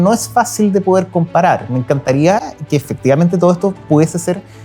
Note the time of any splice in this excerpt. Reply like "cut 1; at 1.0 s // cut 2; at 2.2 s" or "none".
none

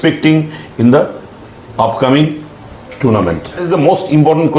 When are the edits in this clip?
cut 1; at 3.7 s

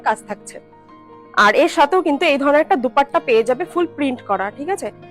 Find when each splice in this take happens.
none

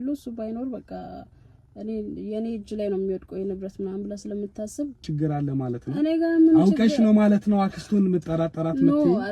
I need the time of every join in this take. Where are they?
cut 1; at 5.1 s

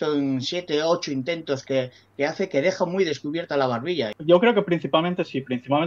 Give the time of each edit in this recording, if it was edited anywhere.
cut 1; at 4.1 s

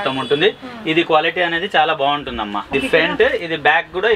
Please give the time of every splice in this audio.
cut 1; at 2.7 s

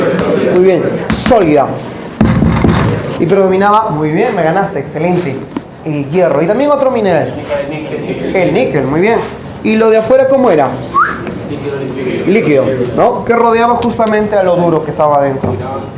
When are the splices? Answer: cut 1; at 4.6 s

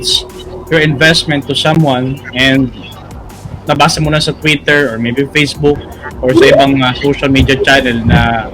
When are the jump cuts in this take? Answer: none

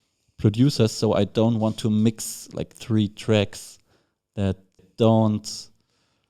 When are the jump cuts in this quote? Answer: cut 1; at 4.9 s

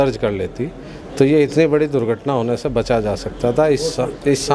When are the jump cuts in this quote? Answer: none

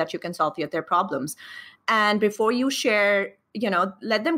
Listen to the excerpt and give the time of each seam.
none

